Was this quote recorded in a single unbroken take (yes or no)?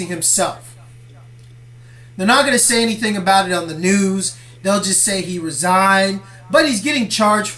no